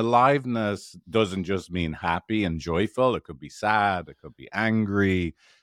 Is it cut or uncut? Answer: uncut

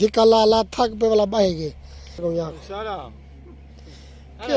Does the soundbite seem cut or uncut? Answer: cut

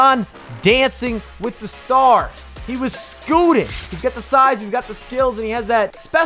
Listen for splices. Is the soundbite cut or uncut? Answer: cut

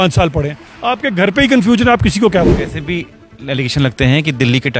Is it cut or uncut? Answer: cut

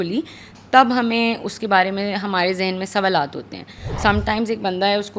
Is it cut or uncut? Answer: cut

